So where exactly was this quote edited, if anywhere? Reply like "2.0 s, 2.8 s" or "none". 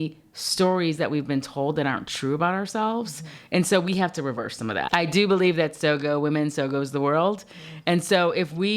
4.8 s